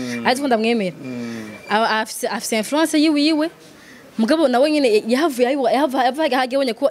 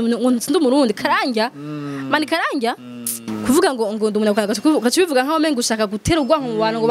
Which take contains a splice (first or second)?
second